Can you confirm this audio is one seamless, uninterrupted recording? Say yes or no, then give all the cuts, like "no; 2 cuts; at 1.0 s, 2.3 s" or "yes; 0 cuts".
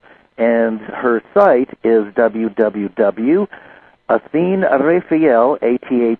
no; 1 cut; at 5.3 s